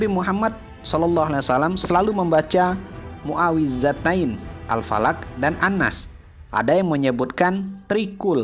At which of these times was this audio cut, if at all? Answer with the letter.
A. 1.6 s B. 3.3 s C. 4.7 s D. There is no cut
D